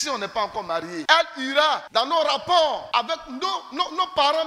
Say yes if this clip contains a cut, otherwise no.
yes